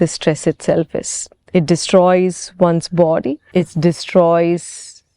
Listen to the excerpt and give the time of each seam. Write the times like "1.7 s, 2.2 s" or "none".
3.4 s